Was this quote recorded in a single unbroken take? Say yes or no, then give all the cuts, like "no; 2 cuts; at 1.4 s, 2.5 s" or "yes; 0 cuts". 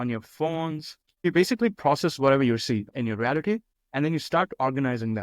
no; 3 cuts; at 1.2 s, 2.9 s, 3.8 s